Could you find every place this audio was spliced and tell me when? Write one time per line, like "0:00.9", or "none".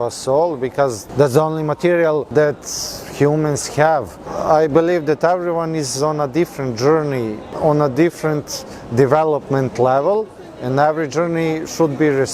0:01.0
0:02.3
0:04.3
0:07.5